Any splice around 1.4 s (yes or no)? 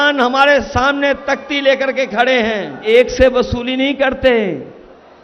no